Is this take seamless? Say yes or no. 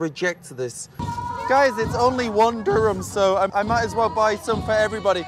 no